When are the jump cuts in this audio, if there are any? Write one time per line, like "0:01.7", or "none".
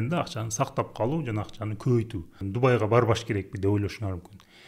0:02.4